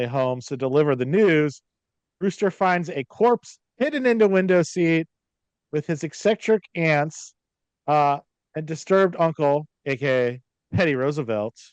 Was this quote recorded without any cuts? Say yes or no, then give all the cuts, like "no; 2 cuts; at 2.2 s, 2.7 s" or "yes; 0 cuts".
yes; 0 cuts